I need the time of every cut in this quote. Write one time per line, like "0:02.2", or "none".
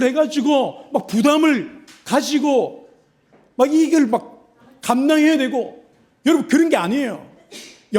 none